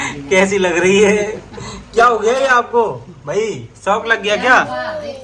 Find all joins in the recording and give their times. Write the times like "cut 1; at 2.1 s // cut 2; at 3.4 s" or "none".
none